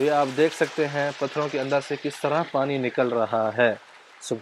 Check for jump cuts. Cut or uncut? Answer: uncut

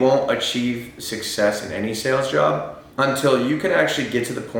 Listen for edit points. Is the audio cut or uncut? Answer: cut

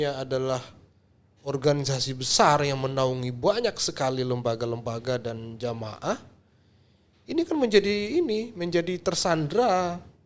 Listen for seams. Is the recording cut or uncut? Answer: uncut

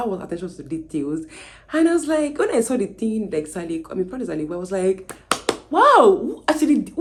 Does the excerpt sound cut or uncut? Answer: uncut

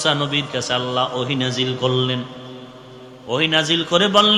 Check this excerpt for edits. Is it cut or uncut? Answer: uncut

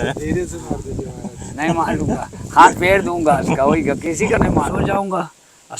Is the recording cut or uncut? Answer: cut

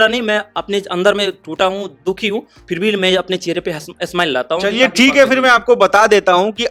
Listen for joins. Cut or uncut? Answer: uncut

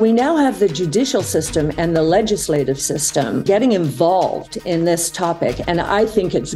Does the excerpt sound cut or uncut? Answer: cut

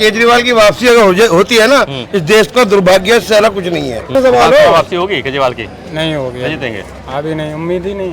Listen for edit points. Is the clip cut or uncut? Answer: cut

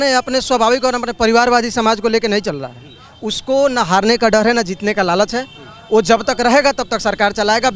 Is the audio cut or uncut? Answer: uncut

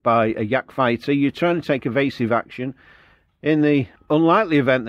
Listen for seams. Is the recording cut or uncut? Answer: cut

